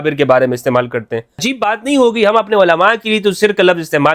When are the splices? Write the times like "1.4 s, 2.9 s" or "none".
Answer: 1.4 s